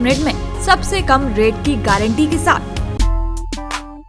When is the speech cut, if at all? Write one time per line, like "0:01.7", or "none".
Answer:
0:02.8